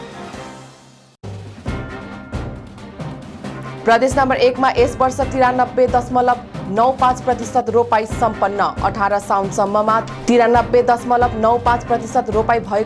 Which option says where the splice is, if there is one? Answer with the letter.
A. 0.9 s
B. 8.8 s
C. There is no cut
A